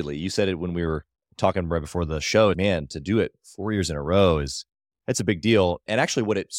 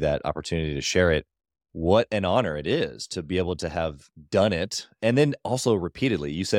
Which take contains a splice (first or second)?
first